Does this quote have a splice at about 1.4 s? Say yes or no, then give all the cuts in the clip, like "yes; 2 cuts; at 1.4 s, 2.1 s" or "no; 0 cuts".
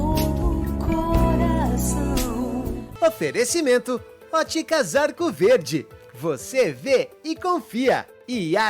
no; 1 cut; at 2.9 s